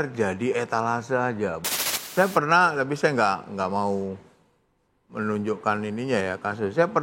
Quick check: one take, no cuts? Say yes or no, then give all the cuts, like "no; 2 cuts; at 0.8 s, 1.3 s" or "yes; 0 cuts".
no; 1 cut; at 1.8 s